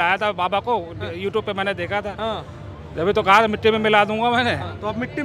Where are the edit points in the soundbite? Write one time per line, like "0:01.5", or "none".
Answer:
none